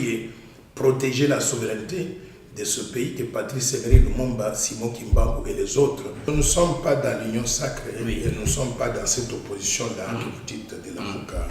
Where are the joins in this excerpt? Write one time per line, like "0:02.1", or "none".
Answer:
0:06.3